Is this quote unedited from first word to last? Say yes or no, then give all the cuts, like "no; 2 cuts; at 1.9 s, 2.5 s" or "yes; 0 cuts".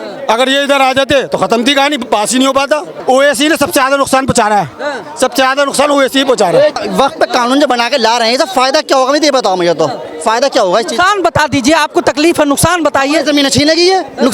no; 2 cuts; at 2.9 s, 6.8 s